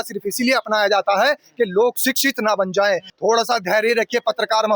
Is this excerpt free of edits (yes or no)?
no